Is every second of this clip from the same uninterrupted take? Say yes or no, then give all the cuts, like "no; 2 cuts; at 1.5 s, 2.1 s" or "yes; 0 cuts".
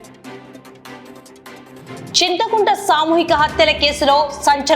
no; 1 cut; at 1.8 s